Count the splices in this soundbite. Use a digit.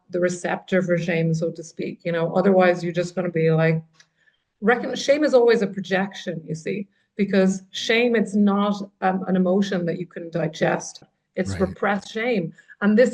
1